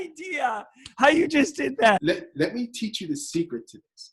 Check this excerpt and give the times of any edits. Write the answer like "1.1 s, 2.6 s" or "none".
none